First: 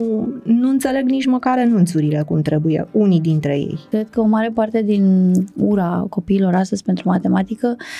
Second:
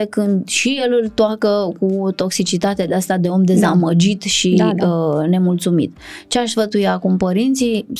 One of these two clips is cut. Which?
first; 2 cuts; at 3.8 s, 5.5 s

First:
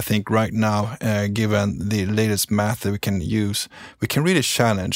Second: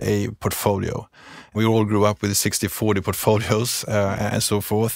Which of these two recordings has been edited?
second; 1 cut; at 1.5 s

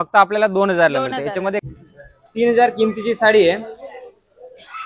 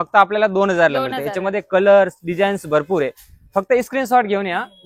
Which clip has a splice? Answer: first; 1 cut; at 1.7 s

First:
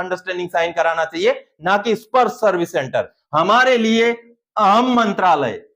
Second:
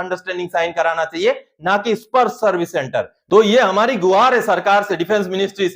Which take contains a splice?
first; 1 cut; at 3.2 s

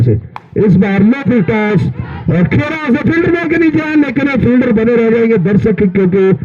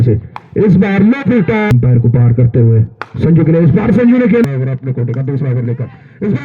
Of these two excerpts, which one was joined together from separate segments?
second; 2 cuts; at 1.7 s, 4.5 s

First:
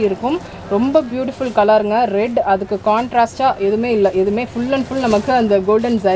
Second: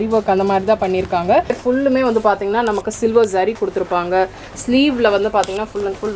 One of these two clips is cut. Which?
second; 1 cut; at 1.6 s

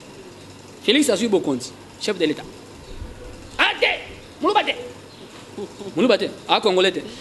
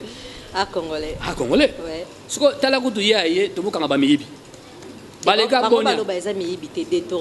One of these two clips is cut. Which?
second; 1 cut; at 2.1 s

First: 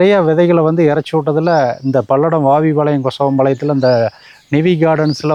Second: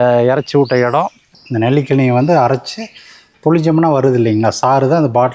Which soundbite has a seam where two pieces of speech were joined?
second; 1 cut; at 1.2 s

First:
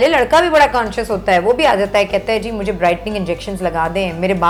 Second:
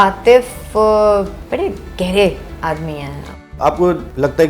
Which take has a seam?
second; 2 cuts; at 1.4 s, 3.6 s

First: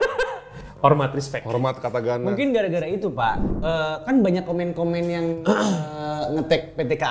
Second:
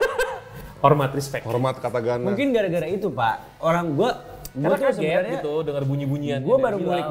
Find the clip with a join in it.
first; 1 cut; at 3.5 s

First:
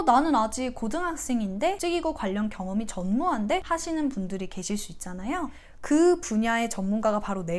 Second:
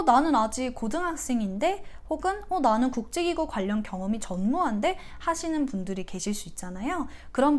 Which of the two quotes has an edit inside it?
first; 3 cuts; at 1.8 s, 3.6 s, 5.6 s

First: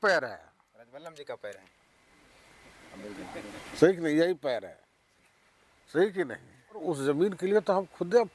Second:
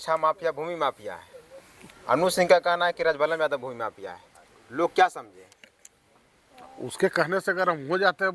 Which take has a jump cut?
first; 1 cut; at 6.8 s

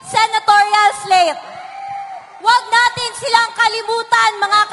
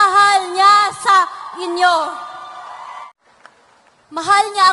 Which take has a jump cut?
second; 1 cut; at 3.1 s

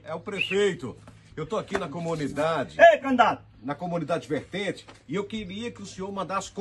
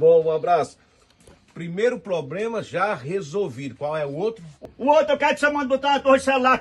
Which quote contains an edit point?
second; 1 cut; at 4.5 s

